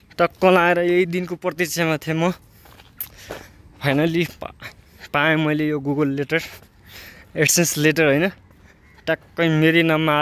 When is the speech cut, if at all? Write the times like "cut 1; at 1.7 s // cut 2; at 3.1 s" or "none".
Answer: none